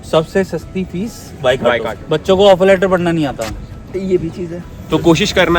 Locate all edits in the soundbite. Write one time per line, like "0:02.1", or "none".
0:01.9
0:04.7